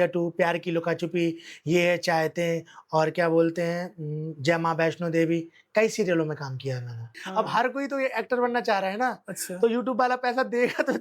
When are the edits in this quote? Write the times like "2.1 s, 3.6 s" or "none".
7.1 s